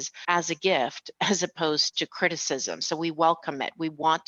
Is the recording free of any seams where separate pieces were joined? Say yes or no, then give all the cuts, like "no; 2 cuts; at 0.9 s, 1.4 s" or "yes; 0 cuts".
yes; 0 cuts